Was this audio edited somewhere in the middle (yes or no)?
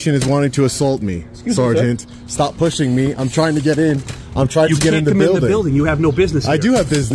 no